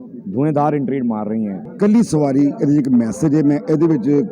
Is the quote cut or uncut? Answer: cut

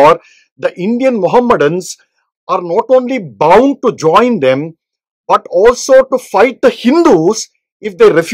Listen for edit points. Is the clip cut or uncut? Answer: uncut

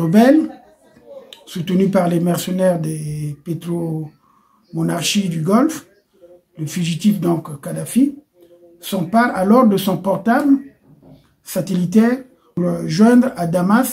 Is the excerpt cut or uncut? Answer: cut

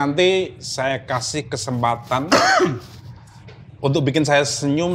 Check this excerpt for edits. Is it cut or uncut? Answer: uncut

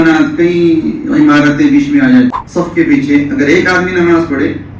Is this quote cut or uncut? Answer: cut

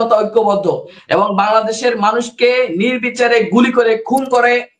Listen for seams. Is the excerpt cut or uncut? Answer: uncut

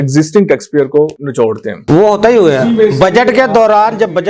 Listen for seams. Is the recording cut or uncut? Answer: uncut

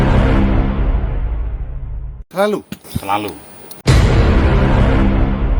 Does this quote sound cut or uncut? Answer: uncut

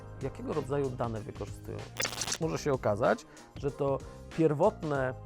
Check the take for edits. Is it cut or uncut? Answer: cut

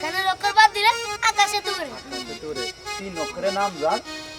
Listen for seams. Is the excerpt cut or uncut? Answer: uncut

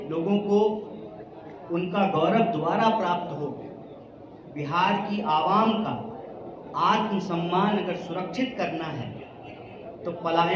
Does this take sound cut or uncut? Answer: uncut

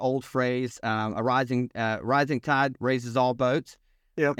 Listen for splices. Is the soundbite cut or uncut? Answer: uncut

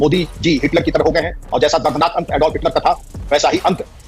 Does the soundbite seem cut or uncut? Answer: uncut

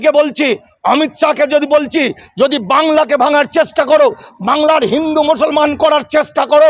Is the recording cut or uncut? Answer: uncut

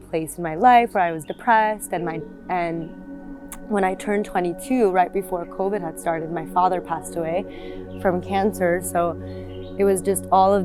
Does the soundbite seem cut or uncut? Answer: uncut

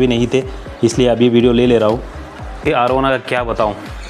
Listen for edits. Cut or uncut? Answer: cut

